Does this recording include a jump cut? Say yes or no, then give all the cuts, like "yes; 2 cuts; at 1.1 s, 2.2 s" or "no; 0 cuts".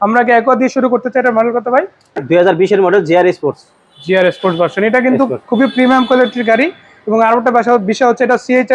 yes; 1 cut; at 2.2 s